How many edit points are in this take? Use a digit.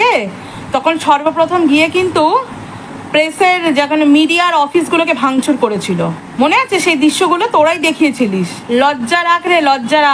2